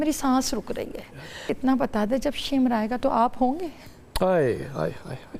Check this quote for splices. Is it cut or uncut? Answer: cut